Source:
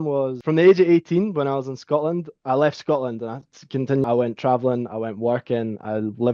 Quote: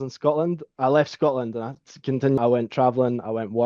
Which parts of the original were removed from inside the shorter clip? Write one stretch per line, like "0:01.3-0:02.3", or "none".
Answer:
none